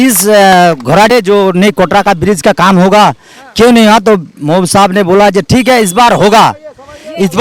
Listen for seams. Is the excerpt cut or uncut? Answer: cut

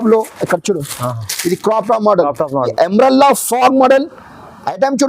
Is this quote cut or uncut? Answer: cut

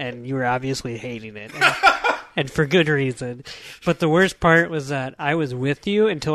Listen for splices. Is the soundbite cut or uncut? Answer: uncut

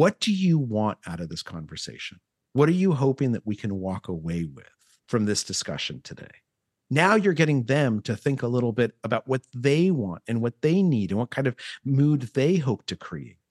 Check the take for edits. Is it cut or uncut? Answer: uncut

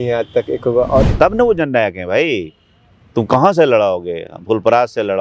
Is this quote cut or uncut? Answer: cut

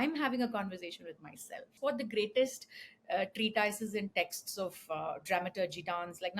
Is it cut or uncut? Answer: cut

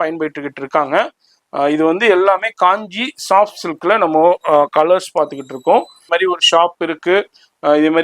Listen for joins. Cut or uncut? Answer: cut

